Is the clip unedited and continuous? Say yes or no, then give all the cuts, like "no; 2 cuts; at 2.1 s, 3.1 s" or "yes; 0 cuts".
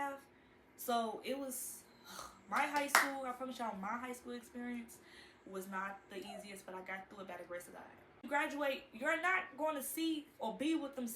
no; 1 cut; at 8.3 s